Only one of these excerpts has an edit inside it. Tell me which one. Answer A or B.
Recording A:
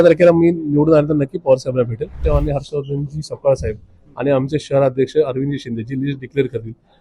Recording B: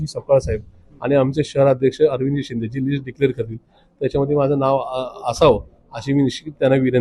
A